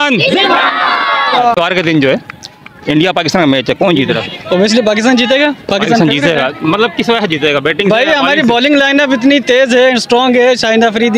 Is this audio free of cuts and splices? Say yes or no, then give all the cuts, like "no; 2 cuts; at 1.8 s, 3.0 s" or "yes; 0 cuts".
no; 1 cut; at 1.6 s